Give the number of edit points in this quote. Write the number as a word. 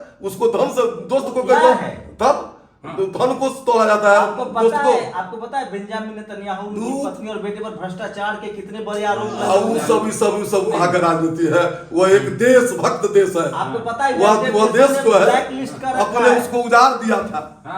zero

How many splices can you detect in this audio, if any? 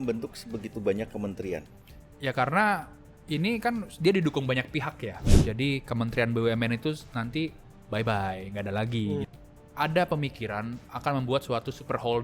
two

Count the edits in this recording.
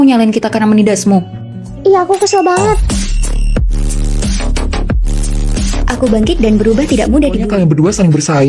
one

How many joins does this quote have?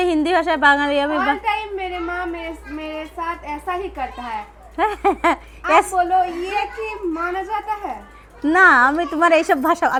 zero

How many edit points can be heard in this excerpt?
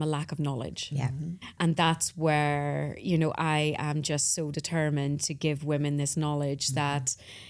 zero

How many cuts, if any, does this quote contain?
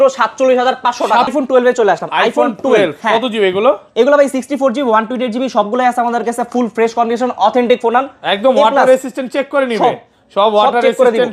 one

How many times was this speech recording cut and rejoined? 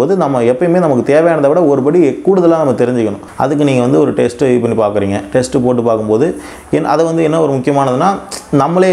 one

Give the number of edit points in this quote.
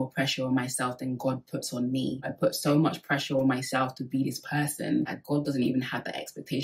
one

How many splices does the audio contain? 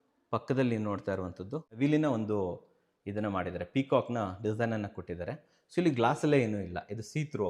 one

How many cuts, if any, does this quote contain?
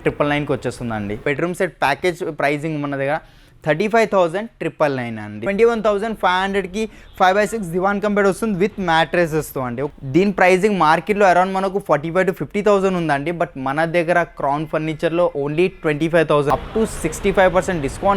four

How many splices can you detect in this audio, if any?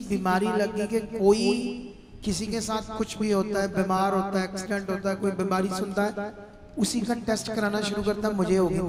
zero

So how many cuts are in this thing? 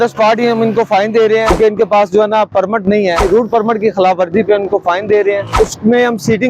three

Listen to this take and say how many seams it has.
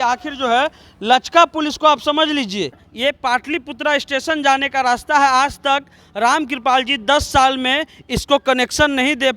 one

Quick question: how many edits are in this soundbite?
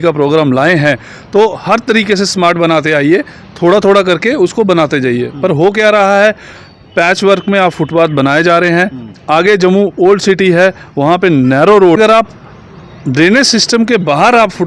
one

